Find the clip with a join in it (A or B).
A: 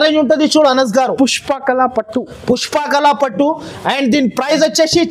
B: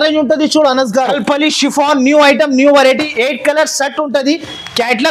B